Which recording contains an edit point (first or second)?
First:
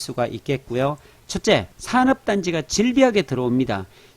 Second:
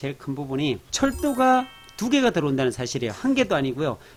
first